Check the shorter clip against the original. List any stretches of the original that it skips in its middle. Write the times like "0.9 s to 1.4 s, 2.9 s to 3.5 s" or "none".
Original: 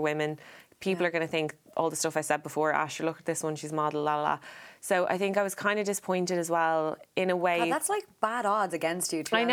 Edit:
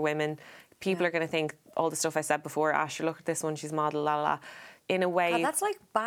4.7 s to 7.0 s